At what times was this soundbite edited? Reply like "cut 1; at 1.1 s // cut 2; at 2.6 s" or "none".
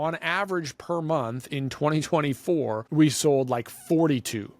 cut 1; at 2.8 s